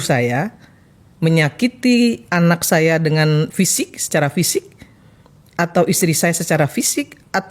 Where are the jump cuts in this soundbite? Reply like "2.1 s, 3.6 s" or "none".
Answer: none